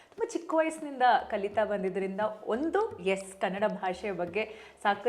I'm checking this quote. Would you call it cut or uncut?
uncut